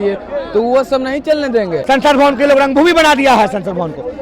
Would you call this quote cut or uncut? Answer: cut